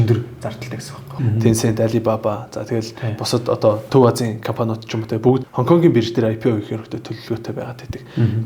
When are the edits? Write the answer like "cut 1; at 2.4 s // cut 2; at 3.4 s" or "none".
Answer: cut 1; at 1.1 s // cut 2; at 3.8 s // cut 3; at 5.5 s